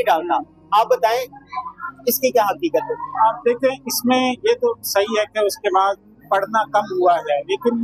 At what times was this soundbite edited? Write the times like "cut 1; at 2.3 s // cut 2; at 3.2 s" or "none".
none

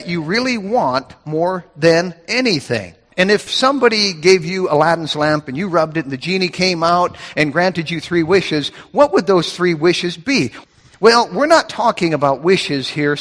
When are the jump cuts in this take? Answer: cut 1; at 3.5 s // cut 2; at 10.6 s

